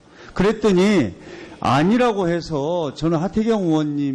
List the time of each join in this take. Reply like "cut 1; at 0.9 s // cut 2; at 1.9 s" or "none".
cut 1; at 2.9 s